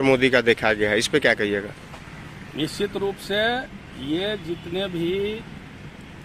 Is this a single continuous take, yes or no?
yes